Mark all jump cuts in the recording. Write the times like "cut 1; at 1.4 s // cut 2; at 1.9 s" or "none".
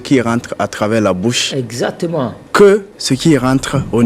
cut 1; at 2.4 s // cut 2; at 2.9 s